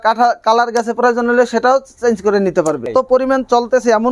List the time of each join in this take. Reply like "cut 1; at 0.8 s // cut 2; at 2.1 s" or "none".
cut 1; at 2.9 s